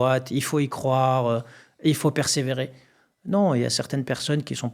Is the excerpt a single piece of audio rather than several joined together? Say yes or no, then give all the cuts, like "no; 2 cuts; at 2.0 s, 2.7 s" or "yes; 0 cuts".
yes; 0 cuts